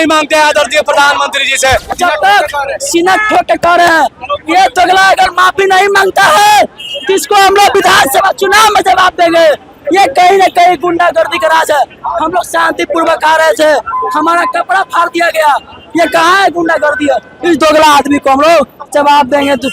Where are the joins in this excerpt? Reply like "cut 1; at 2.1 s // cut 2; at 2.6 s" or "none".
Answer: cut 1; at 2.0 s

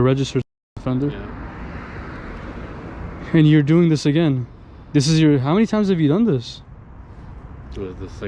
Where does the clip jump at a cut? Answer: none

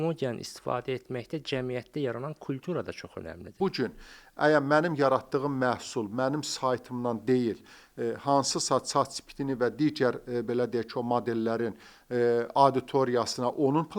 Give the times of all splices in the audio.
cut 1; at 3.6 s

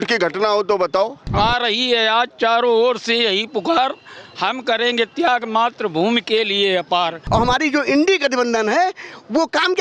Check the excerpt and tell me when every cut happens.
cut 1; at 1.2 s // cut 2; at 7.2 s

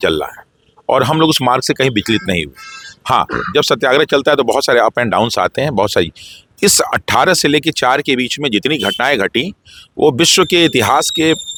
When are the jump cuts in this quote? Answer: none

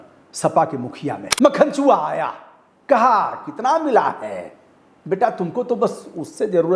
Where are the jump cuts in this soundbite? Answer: cut 1; at 1.3 s

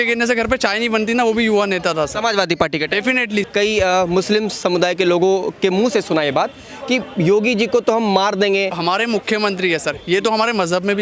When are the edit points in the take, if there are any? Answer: cut 1; at 3.5 s // cut 2; at 8.7 s

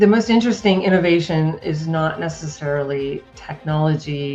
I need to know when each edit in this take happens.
none

